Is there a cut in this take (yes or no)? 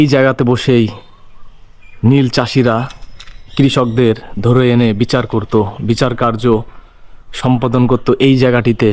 no